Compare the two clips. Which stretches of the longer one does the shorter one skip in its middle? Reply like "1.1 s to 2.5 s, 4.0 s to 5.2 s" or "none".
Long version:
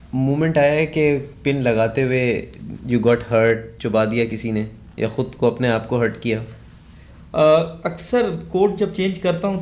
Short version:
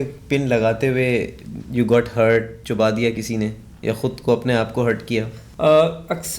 6.6 s to 7.2 s